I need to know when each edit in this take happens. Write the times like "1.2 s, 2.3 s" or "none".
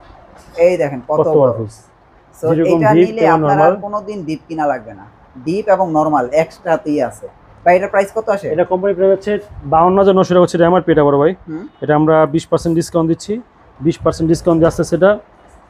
none

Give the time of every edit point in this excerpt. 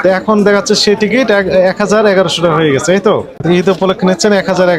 3.3 s

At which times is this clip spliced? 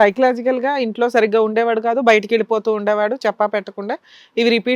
none

